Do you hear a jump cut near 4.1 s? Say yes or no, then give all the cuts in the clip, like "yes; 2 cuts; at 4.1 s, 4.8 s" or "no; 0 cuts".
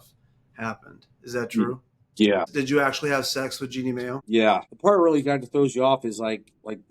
yes; 2 cuts; at 2.5 s, 4.1 s